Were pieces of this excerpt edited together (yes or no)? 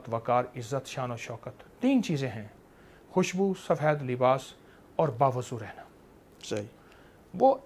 no